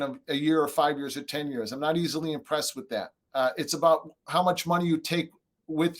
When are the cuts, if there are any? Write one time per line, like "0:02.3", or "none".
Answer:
0:03.2